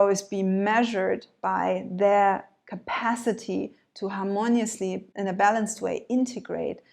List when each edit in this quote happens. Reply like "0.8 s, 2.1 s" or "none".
5.1 s